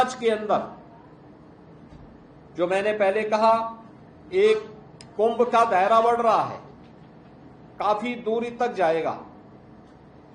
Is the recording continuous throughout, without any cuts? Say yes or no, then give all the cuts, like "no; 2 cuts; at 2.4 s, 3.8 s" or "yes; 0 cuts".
yes; 0 cuts